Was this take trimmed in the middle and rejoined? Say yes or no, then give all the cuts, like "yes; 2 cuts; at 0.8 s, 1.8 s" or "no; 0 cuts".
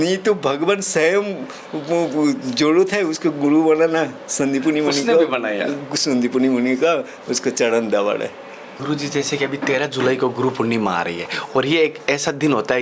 yes; 1 cut; at 8.8 s